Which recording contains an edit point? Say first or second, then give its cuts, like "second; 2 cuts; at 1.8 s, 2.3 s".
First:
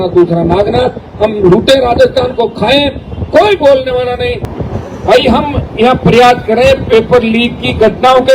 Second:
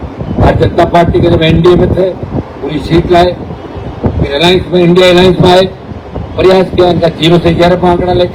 first; 1 cut; at 4.5 s